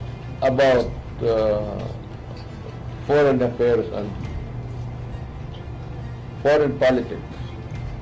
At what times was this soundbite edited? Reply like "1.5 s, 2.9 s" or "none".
none